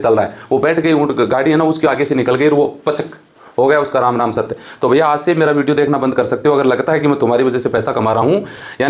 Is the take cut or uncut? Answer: uncut